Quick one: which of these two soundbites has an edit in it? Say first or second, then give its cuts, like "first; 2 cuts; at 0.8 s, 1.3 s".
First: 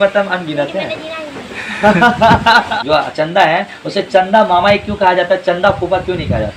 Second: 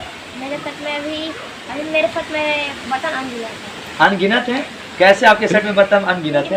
first; 1 cut; at 2.7 s